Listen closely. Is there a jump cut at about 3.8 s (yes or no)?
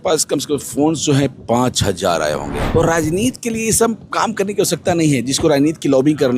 no